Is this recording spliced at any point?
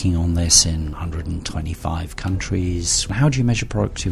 yes; 2 cuts; at 0.9 s, 3.1 s

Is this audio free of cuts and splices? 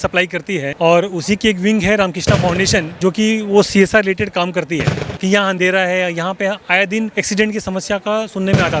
no; 2 cuts; at 2.9 s, 5.2 s

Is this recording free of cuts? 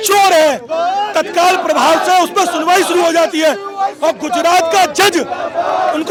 yes; 0 cuts

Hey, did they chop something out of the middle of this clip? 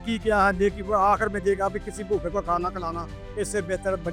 no; 0 cuts

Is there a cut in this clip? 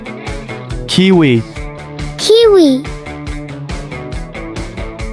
yes; 1 cut; at 0.9 s

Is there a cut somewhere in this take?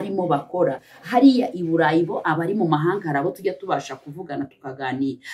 no; 0 cuts

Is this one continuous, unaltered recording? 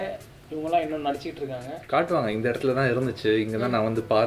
no; 1 cut; at 1.7 s

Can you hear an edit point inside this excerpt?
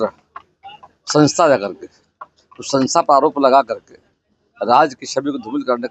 no; 0 cuts

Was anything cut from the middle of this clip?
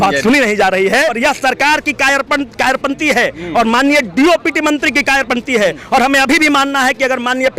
yes; 1 cut; at 1.2 s

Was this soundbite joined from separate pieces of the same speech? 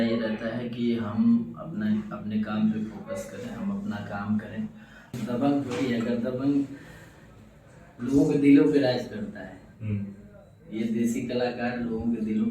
yes; 1 cut; at 5.2 s

